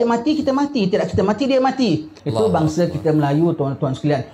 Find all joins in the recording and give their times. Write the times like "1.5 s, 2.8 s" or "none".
2.1 s

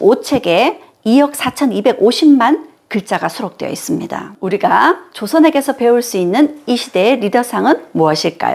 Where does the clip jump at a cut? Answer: 4.4 s

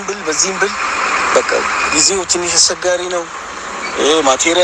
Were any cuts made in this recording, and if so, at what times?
none

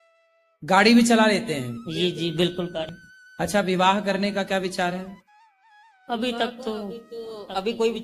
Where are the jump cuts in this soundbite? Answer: 3.0 s

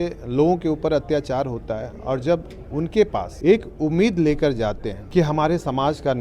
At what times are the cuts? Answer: 3.2 s, 4.9 s

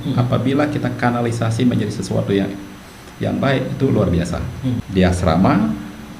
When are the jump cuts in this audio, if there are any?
4.8 s

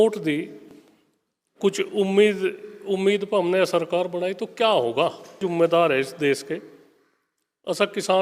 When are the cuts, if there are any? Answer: 5.4 s

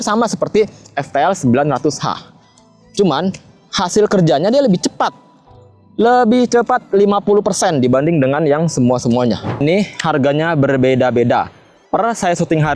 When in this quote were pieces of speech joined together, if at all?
9.6 s

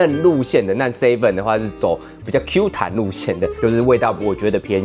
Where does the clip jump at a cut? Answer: 3.5 s

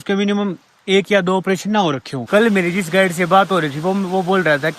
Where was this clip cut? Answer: 2.1 s

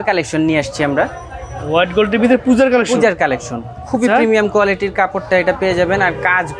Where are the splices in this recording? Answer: none

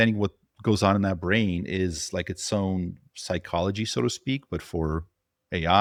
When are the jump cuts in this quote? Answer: none

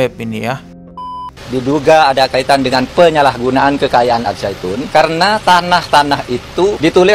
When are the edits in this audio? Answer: 1.0 s

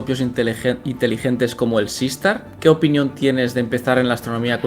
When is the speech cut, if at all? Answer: none

